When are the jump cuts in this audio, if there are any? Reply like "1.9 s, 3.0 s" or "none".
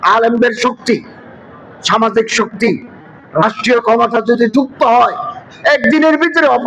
none